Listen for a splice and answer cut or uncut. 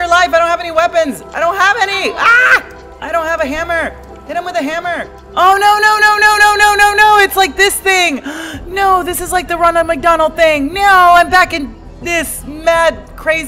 cut